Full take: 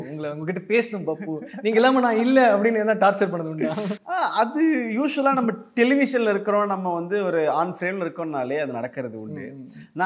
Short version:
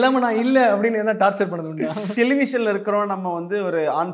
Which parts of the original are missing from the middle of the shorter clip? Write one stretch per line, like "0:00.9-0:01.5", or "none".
0:03.9-0:05.7